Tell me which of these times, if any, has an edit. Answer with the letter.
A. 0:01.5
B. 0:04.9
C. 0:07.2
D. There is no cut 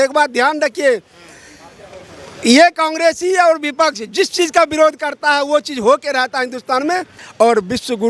C